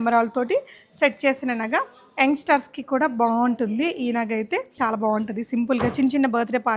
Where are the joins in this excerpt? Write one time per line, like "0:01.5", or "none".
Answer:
0:04.7